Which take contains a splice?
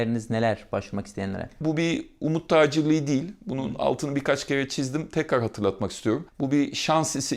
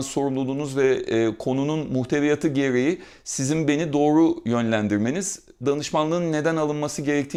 first; 2 cuts; at 1.6 s, 6.3 s

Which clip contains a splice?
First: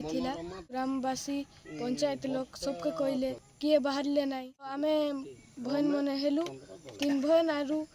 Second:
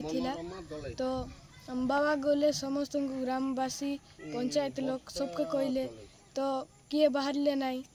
first; 3 cuts; at 0.7 s, 3.5 s, 4.8 s

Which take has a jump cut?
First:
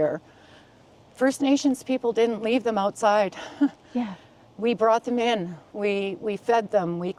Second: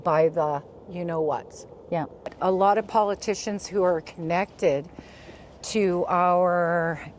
second; 1 cut; at 2.3 s

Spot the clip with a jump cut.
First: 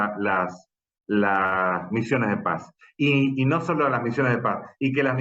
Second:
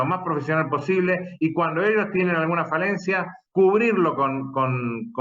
second; 1 cut; at 3.4 s

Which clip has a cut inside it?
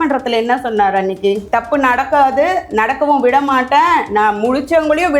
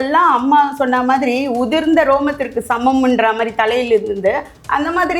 first; 1 cut; at 1.4 s

